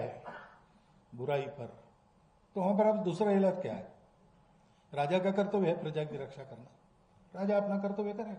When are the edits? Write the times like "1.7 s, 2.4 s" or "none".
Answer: none